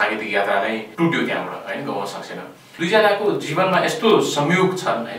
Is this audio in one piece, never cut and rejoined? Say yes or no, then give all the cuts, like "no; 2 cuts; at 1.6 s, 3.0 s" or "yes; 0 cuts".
no; 2 cuts; at 0.9 s, 2.6 s